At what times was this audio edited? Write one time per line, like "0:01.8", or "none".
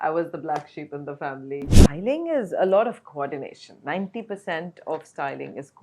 0:01.8